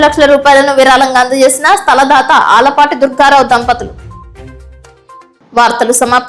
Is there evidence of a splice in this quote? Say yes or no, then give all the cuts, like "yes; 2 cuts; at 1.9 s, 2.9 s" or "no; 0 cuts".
no; 0 cuts